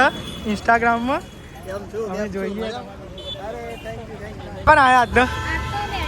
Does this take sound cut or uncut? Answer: cut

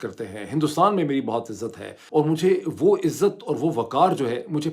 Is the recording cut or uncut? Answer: cut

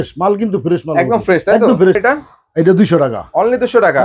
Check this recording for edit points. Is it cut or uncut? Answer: cut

